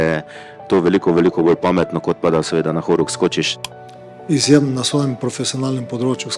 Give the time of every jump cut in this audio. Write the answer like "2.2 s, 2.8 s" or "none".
3.6 s